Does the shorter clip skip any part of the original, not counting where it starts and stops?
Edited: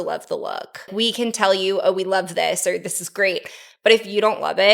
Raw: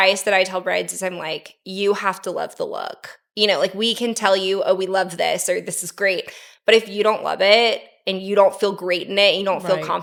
yes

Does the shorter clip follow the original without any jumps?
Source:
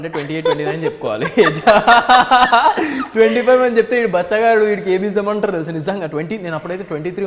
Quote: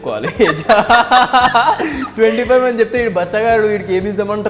yes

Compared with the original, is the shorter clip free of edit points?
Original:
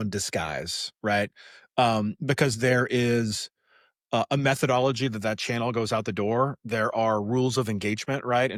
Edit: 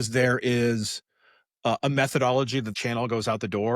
no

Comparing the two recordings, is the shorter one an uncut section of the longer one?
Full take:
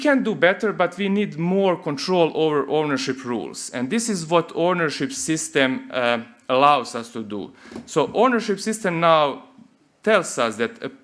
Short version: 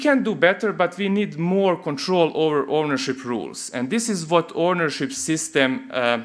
yes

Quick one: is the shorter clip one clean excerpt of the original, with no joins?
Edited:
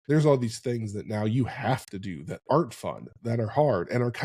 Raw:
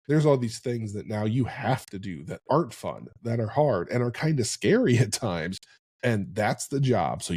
yes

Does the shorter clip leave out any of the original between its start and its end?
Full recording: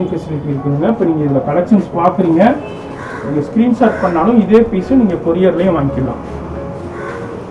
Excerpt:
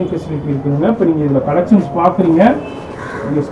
no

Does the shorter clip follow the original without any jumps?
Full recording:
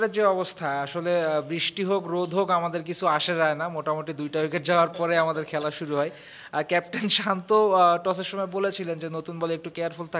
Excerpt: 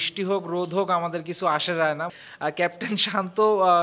no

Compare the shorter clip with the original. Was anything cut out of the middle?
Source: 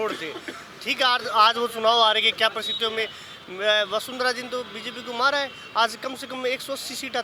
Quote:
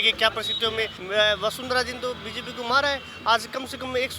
yes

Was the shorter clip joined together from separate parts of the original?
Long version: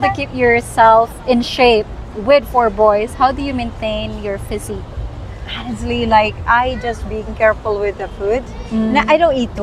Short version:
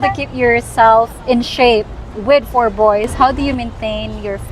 no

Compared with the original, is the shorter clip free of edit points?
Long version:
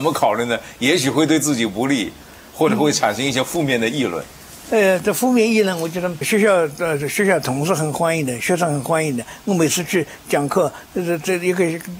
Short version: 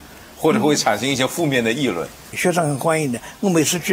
no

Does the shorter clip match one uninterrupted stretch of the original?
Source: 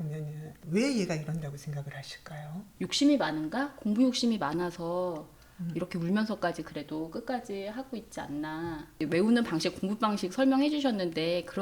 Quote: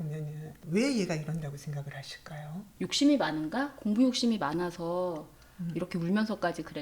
yes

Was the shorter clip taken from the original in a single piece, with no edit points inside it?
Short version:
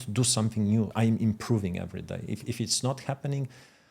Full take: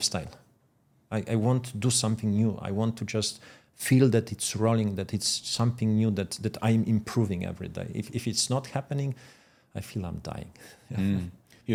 no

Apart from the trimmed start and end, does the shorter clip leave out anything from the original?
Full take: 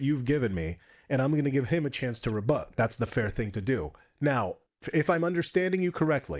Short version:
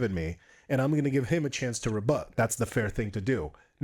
no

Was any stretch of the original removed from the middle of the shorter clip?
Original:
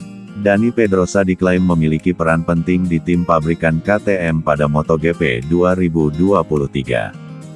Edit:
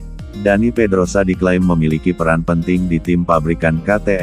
no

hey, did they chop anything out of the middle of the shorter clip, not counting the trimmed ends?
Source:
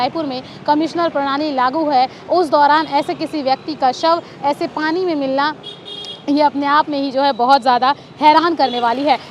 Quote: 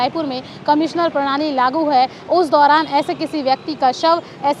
no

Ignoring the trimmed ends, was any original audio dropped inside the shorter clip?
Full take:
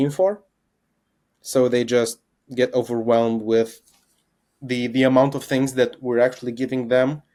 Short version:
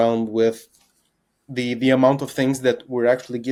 no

